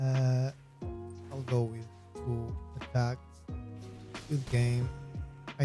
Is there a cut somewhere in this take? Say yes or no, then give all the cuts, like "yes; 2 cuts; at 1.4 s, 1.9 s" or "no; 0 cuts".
no; 0 cuts